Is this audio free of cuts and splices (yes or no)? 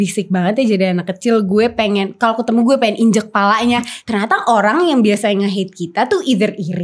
no